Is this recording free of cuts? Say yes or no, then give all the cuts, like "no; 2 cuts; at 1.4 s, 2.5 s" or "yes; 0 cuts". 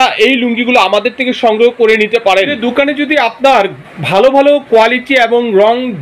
no; 1 cut; at 2.6 s